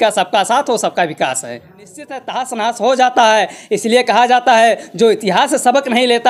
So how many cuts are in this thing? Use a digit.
1